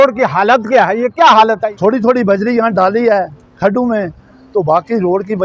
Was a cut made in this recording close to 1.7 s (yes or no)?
yes